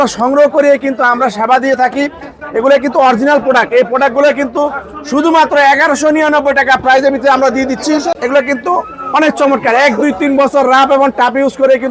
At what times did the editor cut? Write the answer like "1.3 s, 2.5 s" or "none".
8.1 s